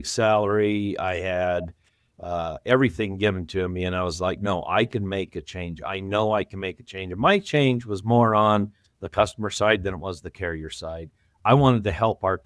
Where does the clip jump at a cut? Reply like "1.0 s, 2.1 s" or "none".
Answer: none